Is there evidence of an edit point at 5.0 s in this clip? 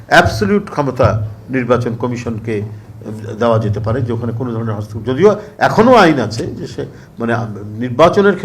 no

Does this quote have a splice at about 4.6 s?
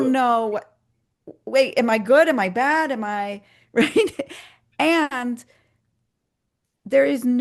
no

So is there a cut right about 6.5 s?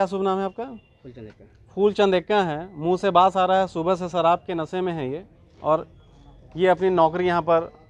no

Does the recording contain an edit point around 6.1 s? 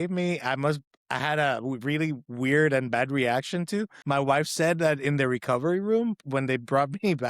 no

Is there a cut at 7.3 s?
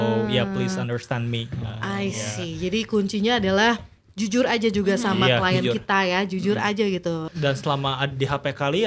yes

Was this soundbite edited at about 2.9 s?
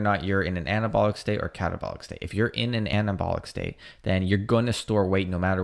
yes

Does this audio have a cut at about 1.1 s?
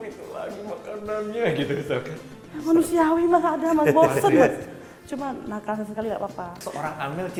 no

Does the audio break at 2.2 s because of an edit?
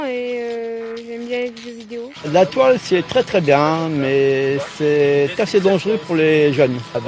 yes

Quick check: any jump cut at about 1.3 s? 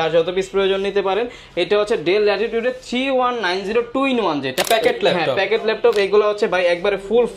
no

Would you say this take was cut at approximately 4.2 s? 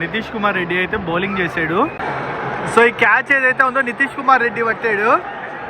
no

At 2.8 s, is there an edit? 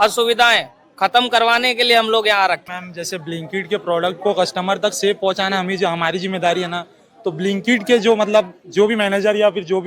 yes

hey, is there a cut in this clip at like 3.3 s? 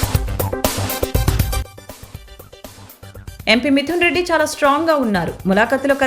yes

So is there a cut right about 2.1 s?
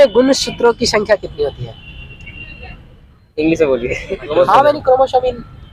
no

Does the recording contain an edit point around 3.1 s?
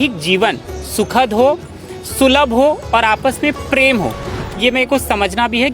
no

